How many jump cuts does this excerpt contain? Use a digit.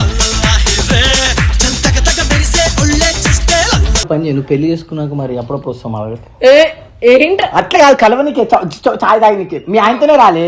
1